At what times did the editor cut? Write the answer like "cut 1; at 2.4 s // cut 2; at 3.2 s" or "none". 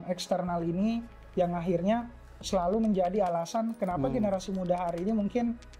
none